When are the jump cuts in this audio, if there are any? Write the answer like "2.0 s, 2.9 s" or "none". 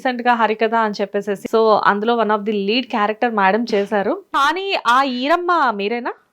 1.4 s, 4.3 s